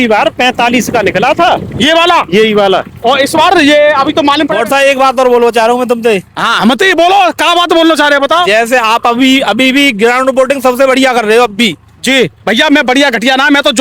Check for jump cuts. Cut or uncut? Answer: cut